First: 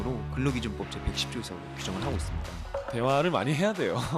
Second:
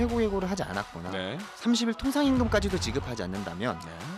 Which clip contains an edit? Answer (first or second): second